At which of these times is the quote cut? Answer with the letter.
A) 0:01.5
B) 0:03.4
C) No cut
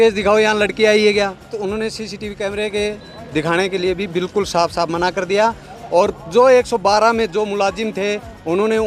A